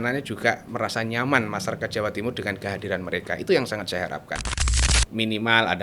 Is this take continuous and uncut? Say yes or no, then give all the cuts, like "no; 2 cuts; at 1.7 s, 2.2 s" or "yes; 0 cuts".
no; 1 cut; at 4.7 s